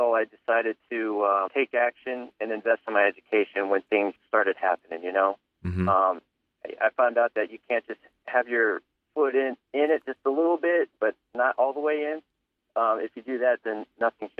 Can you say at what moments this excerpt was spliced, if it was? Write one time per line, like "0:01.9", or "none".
0:01.5
0:04.2